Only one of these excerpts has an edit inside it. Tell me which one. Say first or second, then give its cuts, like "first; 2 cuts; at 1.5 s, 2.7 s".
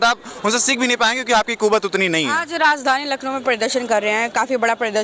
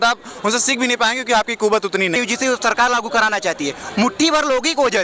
second; 1 cut; at 2.2 s